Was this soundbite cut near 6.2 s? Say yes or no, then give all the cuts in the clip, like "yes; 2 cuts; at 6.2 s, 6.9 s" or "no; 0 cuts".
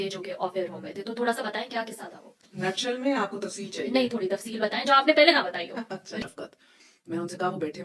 yes; 1 cut; at 6.2 s